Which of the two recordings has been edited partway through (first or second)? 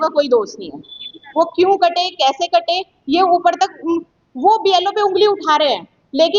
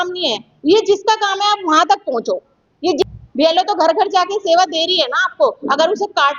second